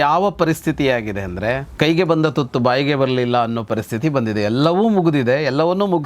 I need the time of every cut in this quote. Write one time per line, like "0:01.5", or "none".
0:01.7